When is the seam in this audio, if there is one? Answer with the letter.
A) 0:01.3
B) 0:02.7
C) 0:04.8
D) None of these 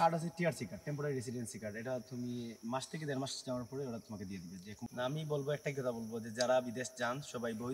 C